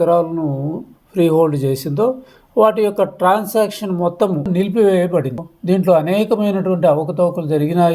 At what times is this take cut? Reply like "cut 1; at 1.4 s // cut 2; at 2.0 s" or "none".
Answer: cut 1; at 4.5 s // cut 2; at 5.5 s